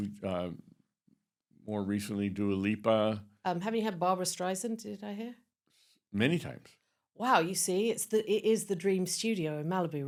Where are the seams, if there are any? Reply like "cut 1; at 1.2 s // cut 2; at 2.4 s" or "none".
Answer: none